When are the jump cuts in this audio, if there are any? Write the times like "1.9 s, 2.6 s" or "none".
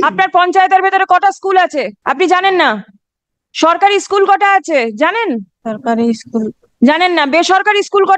2.0 s, 5.5 s